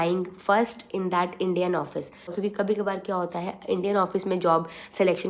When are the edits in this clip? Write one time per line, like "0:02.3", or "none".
0:02.3